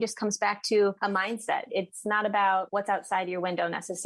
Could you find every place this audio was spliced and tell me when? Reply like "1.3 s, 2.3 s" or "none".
1.5 s, 2.7 s